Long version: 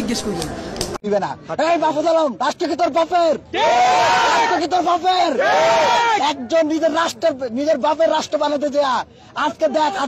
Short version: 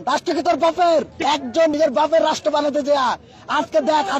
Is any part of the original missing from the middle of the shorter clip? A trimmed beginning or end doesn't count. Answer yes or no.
yes